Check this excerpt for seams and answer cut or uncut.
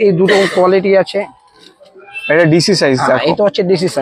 uncut